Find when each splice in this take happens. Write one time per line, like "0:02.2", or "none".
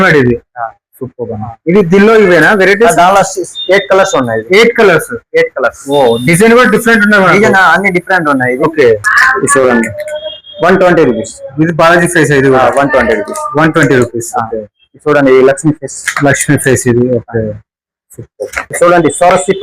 0:09.2
0:18.6